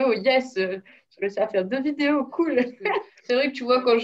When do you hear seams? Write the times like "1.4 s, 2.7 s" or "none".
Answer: 3.1 s